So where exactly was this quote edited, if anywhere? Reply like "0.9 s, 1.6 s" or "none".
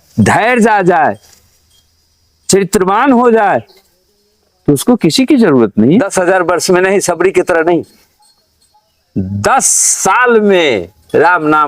6.1 s